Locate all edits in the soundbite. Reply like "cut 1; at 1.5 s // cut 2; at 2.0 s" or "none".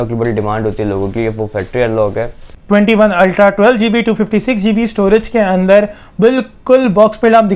cut 1; at 2.5 s